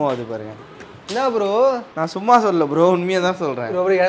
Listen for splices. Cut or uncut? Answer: cut